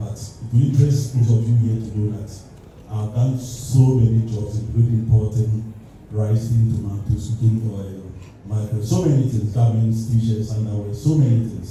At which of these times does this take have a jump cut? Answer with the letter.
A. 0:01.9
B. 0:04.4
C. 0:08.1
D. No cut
D